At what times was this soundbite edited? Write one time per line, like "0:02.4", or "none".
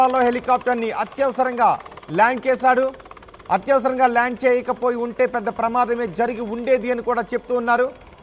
none

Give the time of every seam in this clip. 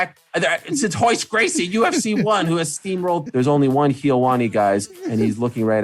0:03.3

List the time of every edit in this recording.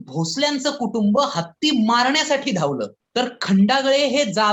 none

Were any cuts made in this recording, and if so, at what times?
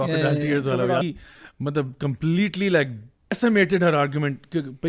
0:01.0
0:03.3

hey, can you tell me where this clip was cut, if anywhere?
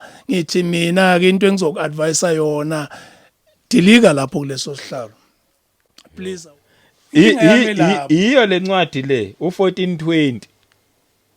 0:06.4

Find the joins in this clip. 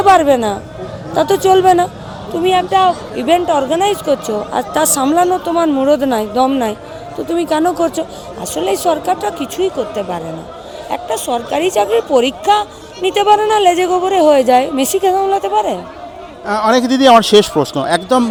none

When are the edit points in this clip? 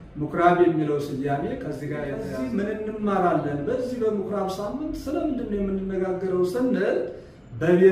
0:02.3

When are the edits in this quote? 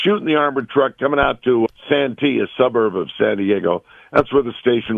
0:01.7

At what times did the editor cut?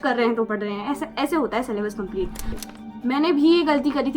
0:02.5

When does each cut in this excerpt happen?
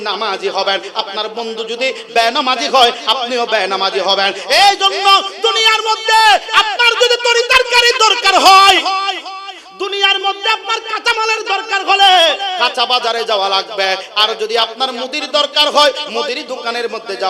none

